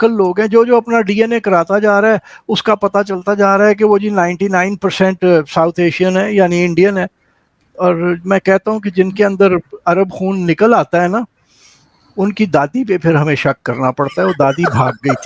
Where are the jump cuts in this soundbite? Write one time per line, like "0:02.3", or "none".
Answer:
none

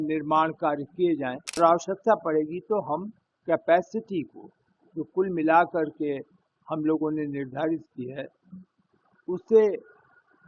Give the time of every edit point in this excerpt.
0:01.6

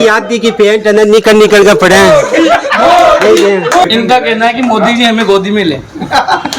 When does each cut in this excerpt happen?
0:03.8

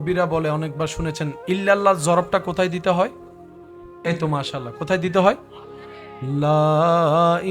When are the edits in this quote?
none

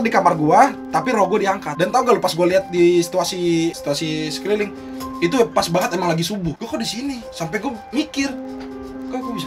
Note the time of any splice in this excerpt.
0:01.7
0:03.8
0:06.5

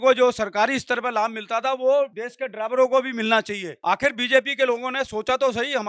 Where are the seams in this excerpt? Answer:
0:03.7

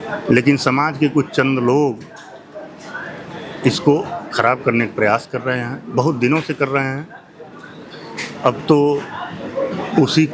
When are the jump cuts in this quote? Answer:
none

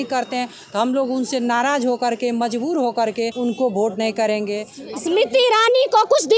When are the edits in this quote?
0:03.3
0:04.7

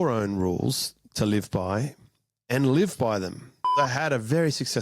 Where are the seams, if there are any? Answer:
0:03.7

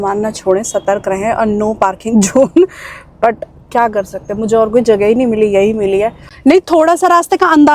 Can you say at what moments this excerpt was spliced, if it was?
0:06.2

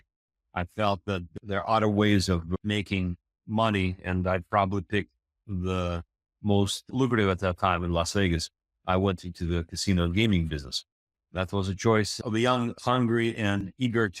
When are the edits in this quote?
none

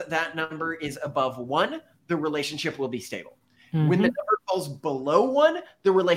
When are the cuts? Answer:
none

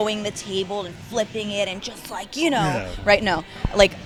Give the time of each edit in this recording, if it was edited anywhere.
none

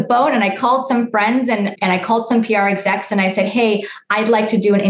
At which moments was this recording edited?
none

